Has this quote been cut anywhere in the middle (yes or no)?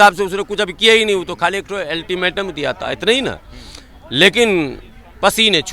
no